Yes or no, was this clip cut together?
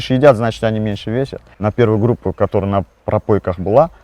yes